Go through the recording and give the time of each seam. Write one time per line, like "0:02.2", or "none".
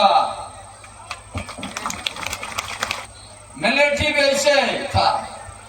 0:03.0